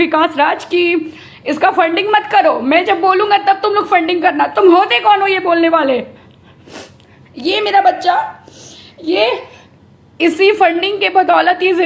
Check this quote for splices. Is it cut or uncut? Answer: uncut